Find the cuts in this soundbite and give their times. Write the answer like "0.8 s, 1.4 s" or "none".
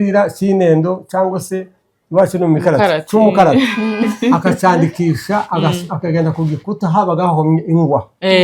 none